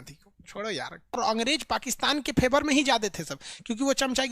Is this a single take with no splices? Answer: no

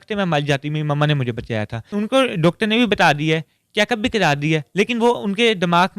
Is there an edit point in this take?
yes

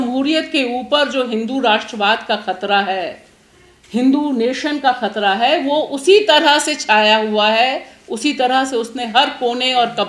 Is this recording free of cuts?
yes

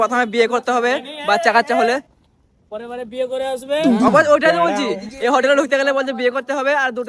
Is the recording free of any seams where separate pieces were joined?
yes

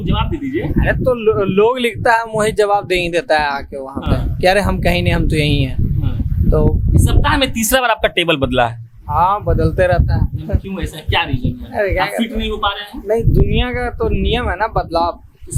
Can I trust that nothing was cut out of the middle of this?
yes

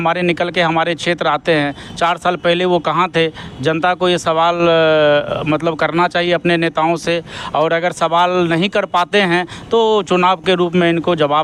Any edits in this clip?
no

